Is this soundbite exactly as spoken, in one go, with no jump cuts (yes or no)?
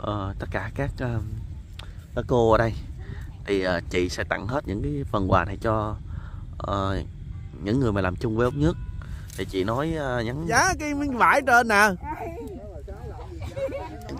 no